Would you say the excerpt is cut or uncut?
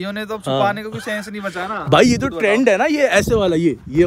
uncut